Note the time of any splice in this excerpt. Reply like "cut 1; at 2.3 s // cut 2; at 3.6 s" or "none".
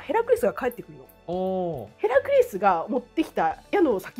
cut 1; at 1.8 s